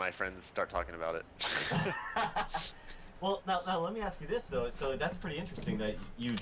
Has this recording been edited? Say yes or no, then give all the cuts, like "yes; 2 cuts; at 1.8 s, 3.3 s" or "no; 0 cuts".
no; 0 cuts